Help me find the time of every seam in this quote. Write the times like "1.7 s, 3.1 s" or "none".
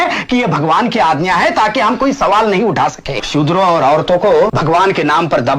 3.2 s, 4.6 s

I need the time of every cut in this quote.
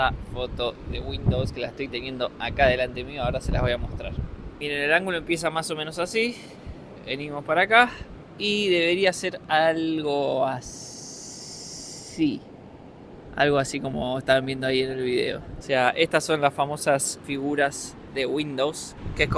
none

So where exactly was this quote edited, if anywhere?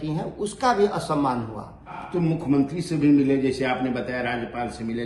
2.0 s

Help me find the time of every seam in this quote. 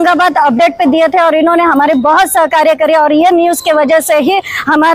none

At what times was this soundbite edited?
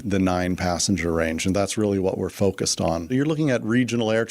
3.1 s

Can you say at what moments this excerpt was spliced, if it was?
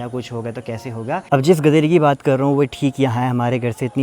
1.2 s

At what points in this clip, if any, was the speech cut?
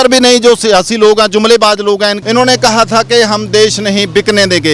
2.2 s

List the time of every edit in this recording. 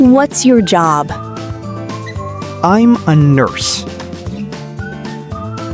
1.1 s, 2.6 s

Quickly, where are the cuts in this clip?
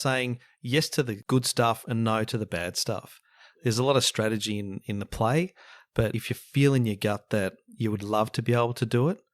1.2 s, 6.1 s

